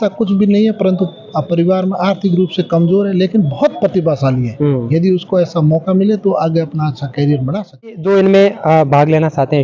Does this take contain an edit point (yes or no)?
yes